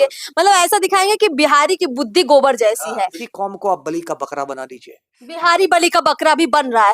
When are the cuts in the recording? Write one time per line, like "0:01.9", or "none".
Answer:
0:03.2